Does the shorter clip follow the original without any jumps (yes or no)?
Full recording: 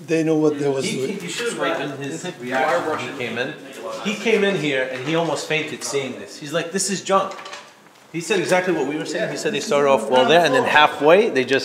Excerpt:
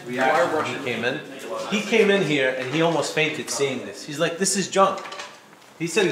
yes